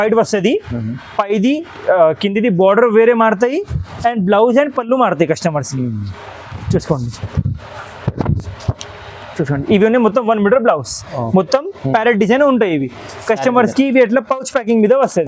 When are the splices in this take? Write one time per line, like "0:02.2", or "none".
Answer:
none